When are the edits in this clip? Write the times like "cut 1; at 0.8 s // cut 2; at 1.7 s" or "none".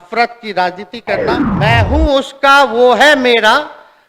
cut 1; at 1.5 s